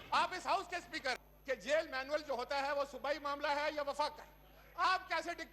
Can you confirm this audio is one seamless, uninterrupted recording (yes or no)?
no